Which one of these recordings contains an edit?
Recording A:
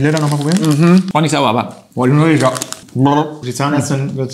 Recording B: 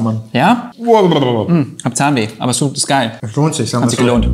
A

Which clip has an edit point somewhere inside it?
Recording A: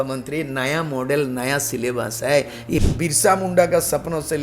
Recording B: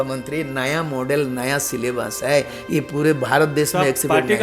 A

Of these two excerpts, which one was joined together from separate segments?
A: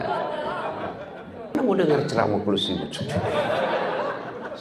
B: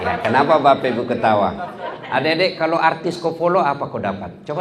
A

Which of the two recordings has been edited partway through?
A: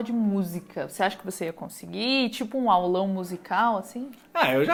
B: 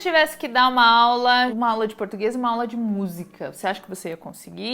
B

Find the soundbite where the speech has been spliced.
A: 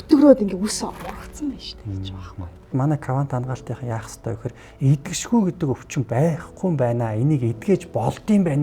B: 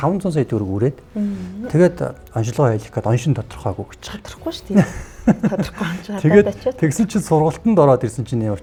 A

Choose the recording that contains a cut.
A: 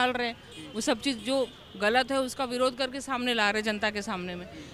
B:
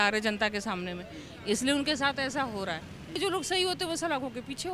B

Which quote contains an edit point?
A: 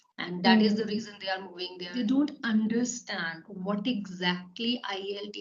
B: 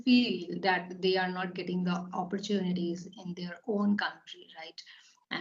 A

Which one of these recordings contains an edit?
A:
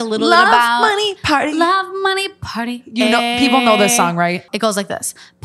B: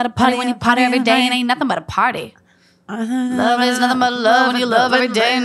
A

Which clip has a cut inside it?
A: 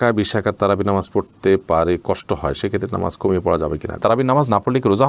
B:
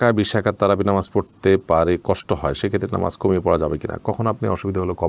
A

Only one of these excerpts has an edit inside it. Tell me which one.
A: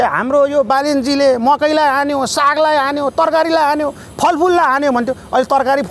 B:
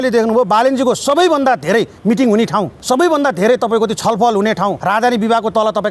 B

